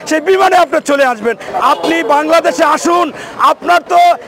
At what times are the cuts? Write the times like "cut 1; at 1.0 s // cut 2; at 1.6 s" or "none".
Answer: cut 1; at 1.5 s

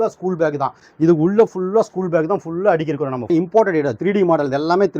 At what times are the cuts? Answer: cut 1; at 3.3 s

